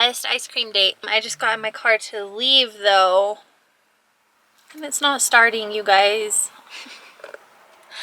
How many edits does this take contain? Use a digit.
1